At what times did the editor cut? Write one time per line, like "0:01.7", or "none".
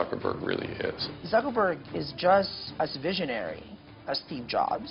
0:01.1
0:02.6